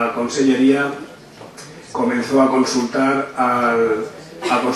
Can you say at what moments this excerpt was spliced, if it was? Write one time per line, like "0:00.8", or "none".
0:02.1